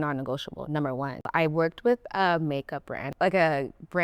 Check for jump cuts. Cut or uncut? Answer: cut